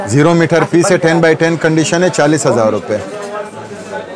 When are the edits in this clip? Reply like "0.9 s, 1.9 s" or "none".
none